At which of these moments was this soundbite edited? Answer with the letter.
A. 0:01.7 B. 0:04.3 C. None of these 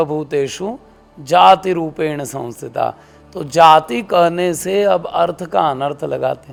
C